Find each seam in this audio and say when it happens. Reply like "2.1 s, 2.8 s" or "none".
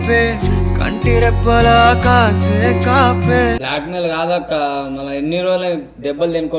3.6 s